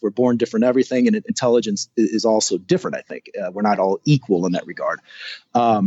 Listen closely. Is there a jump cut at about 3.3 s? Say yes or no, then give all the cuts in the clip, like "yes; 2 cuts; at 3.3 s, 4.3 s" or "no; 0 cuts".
no; 0 cuts